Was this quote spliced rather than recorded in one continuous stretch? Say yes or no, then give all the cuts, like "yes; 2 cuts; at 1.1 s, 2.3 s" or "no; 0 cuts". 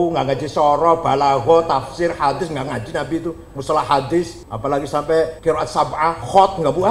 yes; 2 cuts; at 4.4 s, 5.4 s